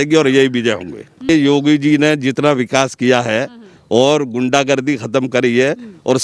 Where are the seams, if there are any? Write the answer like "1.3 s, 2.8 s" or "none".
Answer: 1.3 s